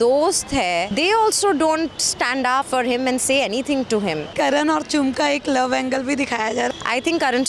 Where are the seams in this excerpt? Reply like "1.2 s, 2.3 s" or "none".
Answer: 0.9 s, 2.7 s, 4.3 s, 6.7 s